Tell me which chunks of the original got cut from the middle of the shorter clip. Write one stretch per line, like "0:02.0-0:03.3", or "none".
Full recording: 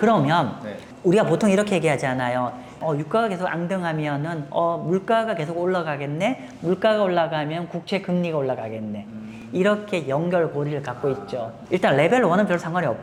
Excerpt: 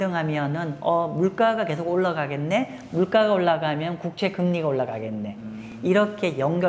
none